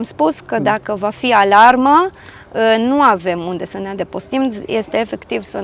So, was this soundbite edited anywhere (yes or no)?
no